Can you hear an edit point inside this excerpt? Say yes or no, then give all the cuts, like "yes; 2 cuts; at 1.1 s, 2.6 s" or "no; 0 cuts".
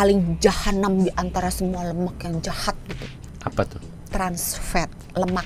no; 0 cuts